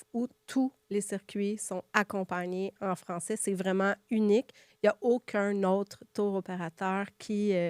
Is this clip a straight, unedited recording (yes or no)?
yes